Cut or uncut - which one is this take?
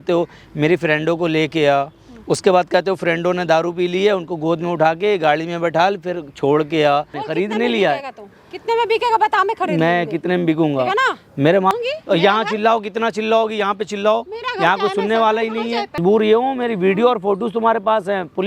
cut